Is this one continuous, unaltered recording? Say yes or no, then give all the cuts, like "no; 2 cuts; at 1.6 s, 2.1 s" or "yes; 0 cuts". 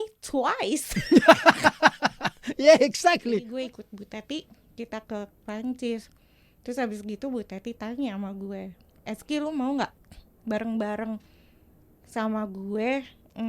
no; 1 cut; at 3.5 s